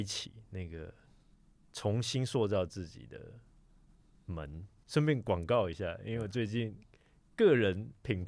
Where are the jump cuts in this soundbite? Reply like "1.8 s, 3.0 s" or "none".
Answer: 4.8 s

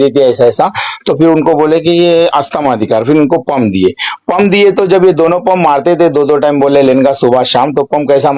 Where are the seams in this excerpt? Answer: none

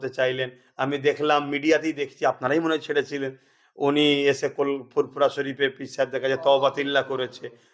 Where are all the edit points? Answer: none

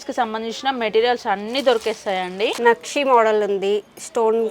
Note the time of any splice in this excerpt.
2.6 s

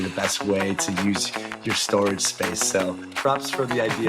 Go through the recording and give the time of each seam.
3.1 s

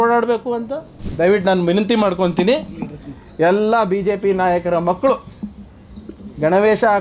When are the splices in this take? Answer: 1.0 s

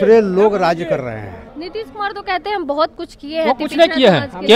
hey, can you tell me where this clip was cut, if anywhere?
1.6 s

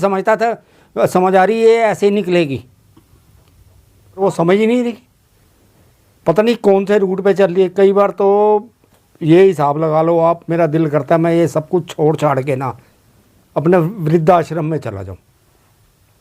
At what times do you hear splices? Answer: 4.2 s

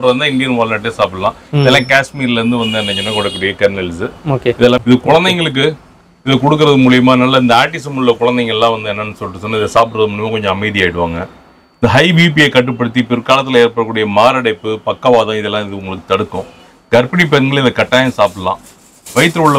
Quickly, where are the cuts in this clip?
4.8 s

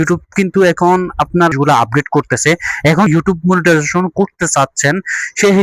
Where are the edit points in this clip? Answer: 1.5 s, 3.1 s

